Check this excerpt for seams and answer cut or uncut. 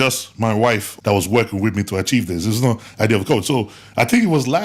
cut